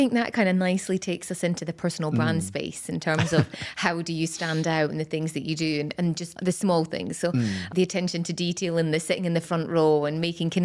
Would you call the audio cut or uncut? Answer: cut